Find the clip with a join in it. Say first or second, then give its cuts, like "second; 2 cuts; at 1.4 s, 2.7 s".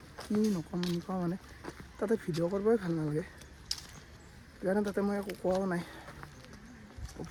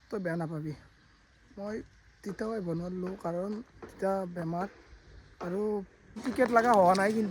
second; 1 cut; at 6.2 s